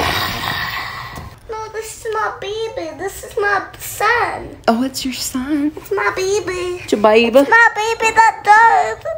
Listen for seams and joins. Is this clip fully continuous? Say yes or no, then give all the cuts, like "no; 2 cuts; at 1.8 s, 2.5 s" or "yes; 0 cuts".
yes; 0 cuts